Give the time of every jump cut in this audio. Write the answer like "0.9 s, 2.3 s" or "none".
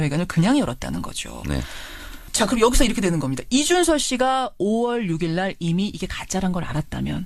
3.7 s